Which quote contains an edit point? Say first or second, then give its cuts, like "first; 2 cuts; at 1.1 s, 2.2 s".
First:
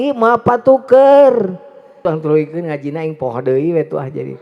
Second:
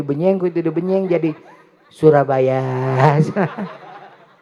first; 1 cut; at 2.0 s